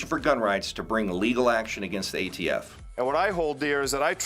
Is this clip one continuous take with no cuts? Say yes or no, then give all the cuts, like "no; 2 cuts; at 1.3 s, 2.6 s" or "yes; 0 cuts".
no; 1 cut; at 2.7 s